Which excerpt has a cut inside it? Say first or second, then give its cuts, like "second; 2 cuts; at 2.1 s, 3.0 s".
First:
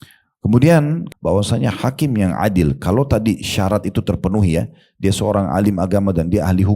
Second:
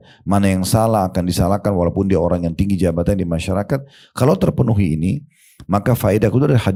first; 1 cut; at 1.0 s